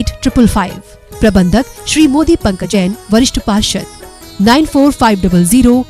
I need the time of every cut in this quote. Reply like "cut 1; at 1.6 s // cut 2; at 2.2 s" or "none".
cut 1; at 2.7 s